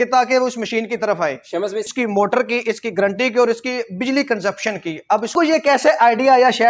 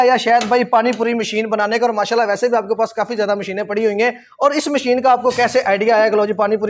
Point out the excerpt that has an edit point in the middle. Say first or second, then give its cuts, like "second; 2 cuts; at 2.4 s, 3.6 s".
first; 2 cuts; at 1.8 s, 5.3 s